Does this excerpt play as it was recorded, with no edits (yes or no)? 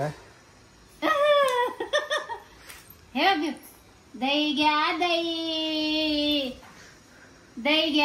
yes